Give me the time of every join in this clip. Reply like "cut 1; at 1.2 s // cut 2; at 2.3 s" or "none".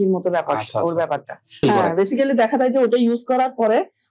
cut 1; at 1.6 s